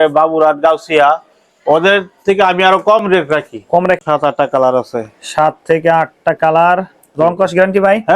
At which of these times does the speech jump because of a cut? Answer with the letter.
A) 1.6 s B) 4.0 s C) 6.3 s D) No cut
B